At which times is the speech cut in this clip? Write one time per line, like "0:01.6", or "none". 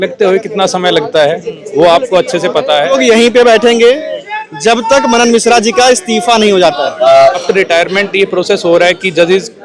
0:02.9
0:07.4